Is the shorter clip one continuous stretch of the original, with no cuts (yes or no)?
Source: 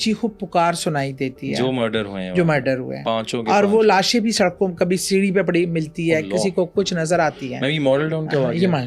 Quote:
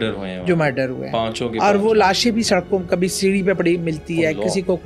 yes